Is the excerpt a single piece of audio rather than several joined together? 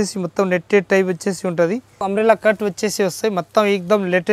no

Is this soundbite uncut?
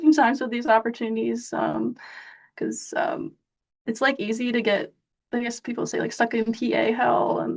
yes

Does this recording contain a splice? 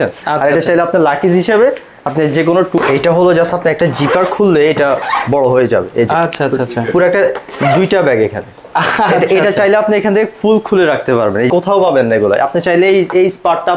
yes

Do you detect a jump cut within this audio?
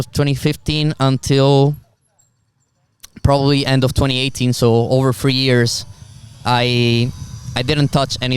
no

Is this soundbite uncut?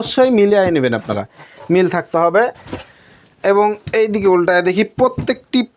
yes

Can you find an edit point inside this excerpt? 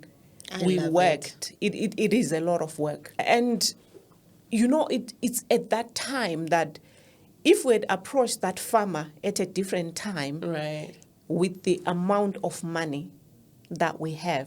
yes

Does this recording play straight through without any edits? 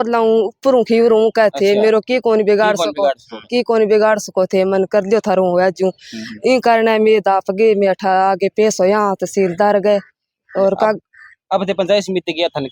yes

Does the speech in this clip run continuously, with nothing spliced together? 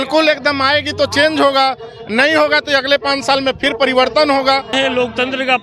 no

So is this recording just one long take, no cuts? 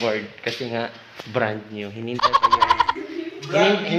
no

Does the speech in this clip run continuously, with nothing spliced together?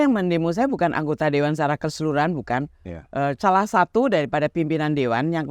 yes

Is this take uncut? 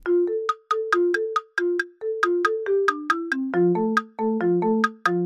yes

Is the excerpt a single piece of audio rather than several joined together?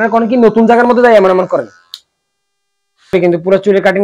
no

